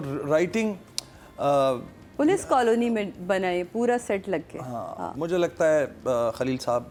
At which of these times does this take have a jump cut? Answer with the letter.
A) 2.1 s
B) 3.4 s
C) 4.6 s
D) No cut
D